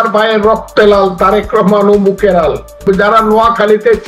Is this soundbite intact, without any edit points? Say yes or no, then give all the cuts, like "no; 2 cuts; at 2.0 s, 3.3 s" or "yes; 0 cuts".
no; 1 cut; at 2.8 s